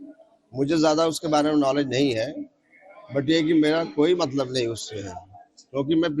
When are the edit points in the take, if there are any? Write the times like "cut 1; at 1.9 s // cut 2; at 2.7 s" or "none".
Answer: cut 1; at 1.9 s